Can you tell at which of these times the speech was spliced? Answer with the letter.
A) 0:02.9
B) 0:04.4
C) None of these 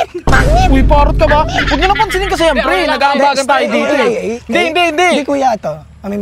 C